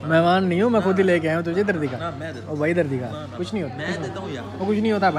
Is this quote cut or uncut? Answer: uncut